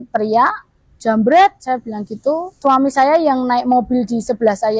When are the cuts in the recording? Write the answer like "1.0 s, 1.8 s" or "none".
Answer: 2.5 s